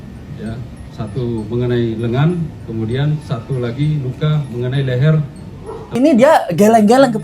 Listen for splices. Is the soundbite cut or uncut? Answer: cut